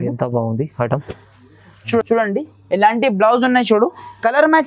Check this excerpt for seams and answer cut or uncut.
cut